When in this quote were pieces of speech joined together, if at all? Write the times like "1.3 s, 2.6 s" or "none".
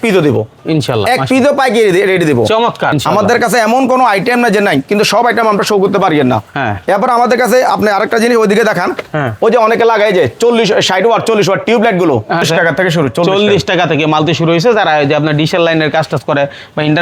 3.0 s, 12.4 s